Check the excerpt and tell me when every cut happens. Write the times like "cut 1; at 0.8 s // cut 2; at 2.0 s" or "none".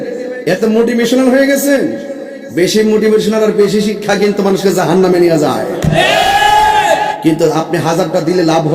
cut 1; at 7.1 s

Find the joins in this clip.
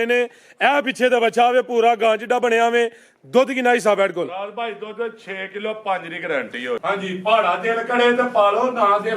cut 1; at 6.8 s

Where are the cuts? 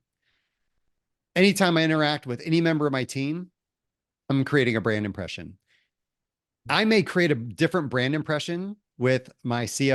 none

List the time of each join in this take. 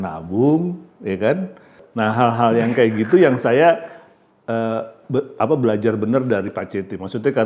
cut 1; at 1.8 s

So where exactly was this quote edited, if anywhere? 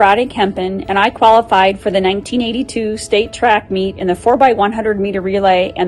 none

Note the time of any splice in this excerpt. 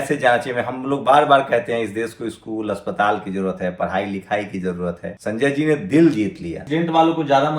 cut 1; at 5.1 s // cut 2; at 6.6 s

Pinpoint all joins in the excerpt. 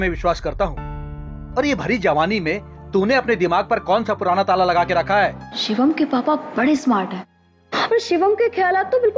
cut 1; at 5.5 s

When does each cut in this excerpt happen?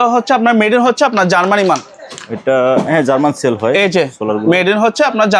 none

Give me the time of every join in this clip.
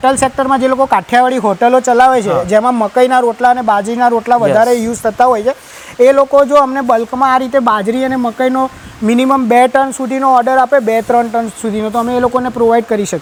none

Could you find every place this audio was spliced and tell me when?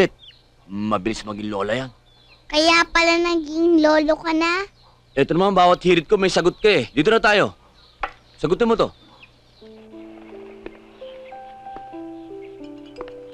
none

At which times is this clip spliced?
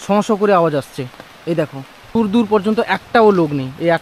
cut 1; at 2.1 s

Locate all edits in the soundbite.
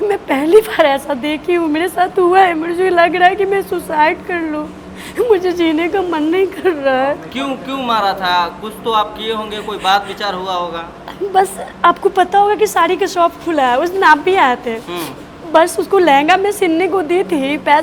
none

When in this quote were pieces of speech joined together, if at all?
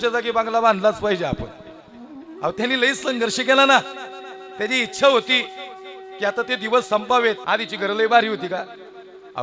cut 1; at 7.4 s

